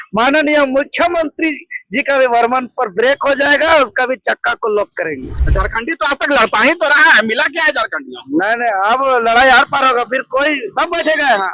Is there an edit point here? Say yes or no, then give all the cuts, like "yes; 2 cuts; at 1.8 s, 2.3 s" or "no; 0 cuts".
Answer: yes; 1 cut; at 5.3 s